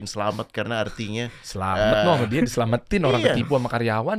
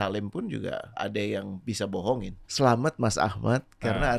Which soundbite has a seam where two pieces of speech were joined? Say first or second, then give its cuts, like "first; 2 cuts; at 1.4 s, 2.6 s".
second; 2 cuts; at 0.9 s, 2.4 s